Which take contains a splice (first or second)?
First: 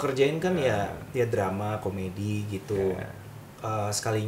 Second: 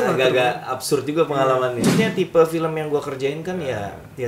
second